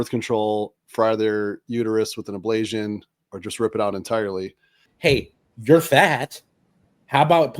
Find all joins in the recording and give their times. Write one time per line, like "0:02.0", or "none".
0:04.8